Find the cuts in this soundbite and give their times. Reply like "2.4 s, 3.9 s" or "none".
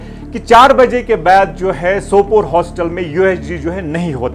none